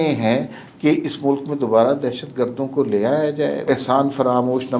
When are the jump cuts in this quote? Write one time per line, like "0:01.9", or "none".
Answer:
0:03.6